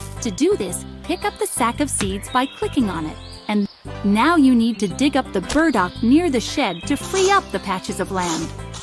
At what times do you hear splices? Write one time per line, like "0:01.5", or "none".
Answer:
0:03.7